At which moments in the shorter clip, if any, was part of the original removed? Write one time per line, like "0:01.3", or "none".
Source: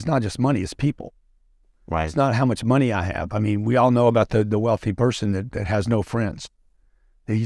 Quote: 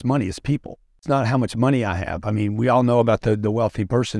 0:01.0